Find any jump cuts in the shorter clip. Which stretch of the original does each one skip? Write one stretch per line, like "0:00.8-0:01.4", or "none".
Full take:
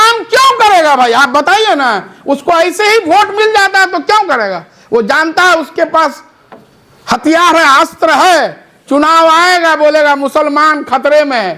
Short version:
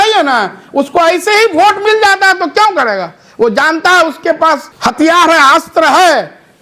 0:06.2-0:07.0